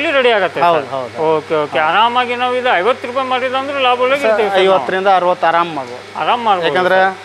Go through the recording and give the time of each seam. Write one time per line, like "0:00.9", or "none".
none